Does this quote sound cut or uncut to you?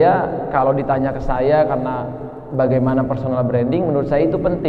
uncut